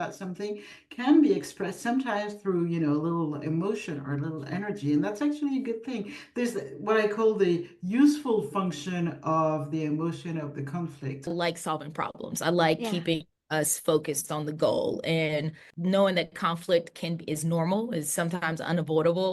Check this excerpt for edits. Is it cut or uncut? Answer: cut